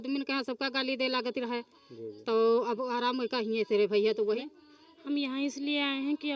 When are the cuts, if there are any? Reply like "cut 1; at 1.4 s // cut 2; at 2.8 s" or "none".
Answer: cut 1; at 4.4 s